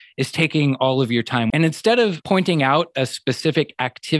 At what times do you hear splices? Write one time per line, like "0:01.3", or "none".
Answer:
0:01.5
0:02.2